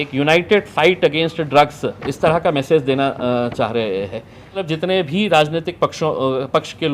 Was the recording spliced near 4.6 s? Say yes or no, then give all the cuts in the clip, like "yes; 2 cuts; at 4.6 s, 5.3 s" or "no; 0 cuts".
yes; 1 cut; at 4.6 s